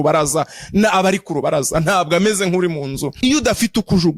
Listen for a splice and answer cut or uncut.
cut